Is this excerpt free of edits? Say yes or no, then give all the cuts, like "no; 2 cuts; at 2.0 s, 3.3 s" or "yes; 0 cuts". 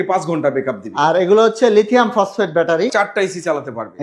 no; 1 cut; at 2.9 s